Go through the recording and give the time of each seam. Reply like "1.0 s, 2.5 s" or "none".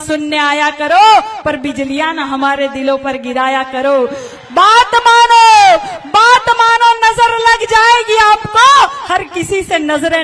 none